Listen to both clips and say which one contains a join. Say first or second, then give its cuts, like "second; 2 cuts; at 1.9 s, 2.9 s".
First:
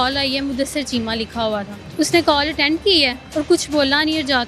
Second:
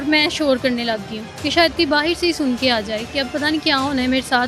first; 2 cuts; at 1.8 s, 3.2 s